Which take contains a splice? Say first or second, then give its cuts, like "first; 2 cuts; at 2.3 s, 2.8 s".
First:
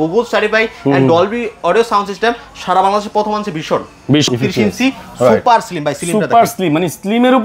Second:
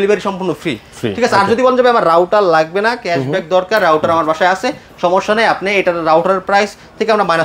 first; 1 cut; at 4.3 s